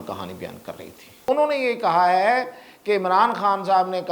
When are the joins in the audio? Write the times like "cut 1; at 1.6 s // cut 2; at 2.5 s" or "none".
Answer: cut 1; at 1.3 s